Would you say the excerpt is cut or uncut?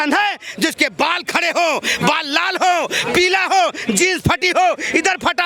uncut